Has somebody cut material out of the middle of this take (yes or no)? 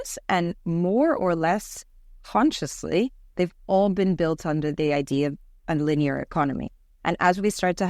no